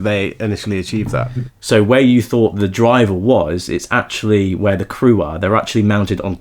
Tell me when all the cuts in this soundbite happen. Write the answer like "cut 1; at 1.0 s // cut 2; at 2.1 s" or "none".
cut 1; at 1.5 s